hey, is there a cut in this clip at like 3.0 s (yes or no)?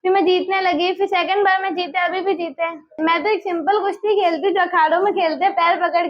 yes